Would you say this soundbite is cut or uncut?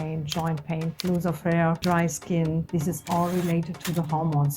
cut